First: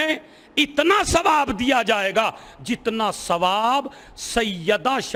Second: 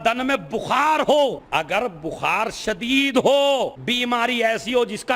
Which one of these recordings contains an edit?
second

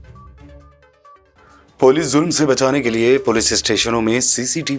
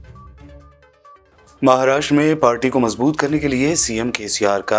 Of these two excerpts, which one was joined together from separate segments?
second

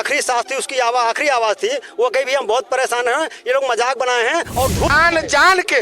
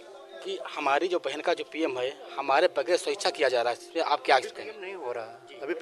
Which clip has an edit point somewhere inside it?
first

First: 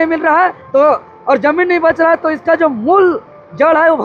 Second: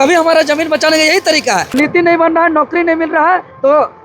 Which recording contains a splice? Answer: second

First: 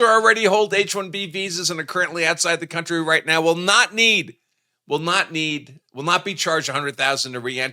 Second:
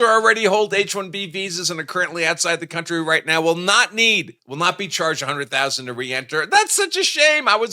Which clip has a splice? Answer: second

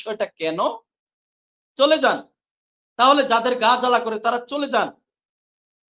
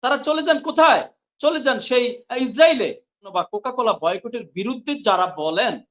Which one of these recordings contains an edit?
second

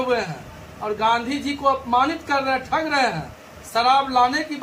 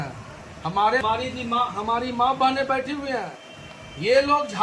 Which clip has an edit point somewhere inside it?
second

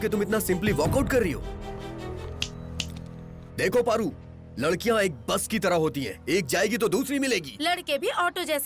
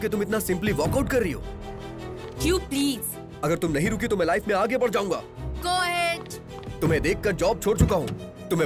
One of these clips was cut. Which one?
first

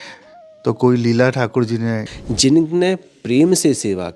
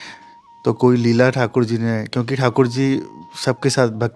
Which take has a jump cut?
first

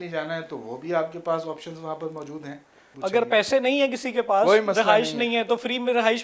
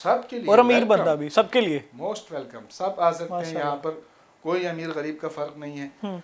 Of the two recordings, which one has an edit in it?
first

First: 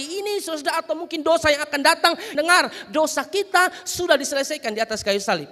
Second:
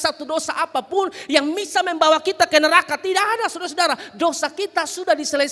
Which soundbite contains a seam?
first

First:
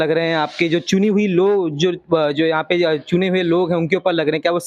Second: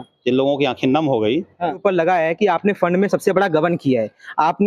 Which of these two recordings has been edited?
second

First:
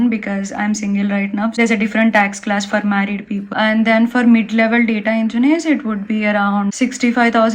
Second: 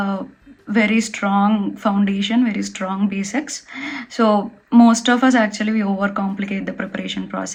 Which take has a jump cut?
first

